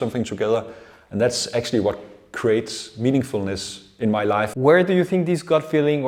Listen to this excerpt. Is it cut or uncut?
cut